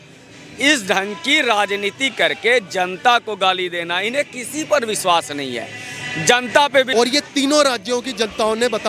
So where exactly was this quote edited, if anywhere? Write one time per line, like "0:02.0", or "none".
0:06.9